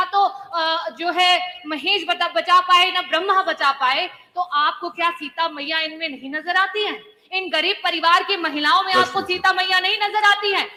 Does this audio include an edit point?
no; 0 cuts

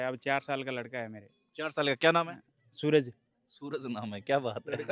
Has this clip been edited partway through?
no; 0 cuts

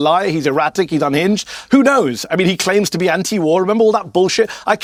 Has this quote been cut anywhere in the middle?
no; 0 cuts

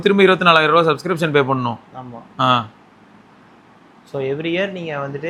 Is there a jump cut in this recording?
no; 0 cuts

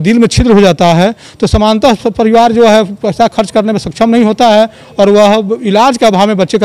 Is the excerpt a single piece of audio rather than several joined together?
yes; 0 cuts

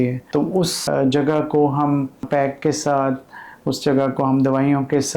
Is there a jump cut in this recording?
yes; 2 cuts; at 0.8 s, 2.3 s

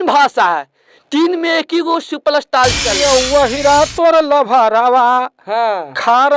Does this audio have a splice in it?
yes; 1 cut; at 2.9 s

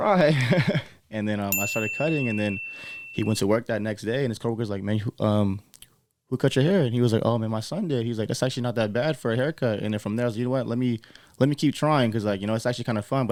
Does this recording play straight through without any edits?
yes; 0 cuts

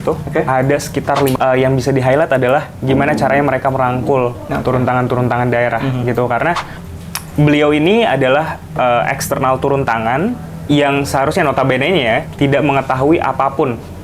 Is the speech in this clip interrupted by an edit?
yes; 2 cuts; at 1.3 s, 6.8 s

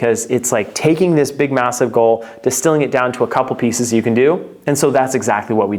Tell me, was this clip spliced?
no; 0 cuts

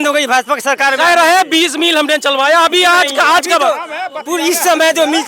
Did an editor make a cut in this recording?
no; 0 cuts

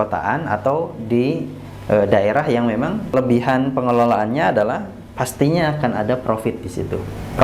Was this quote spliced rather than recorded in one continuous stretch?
yes; 1 cut; at 3.1 s

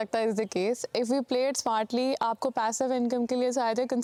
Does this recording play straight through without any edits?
yes; 0 cuts

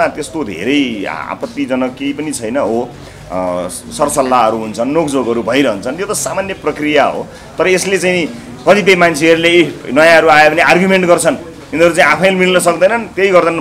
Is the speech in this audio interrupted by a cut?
no; 0 cuts

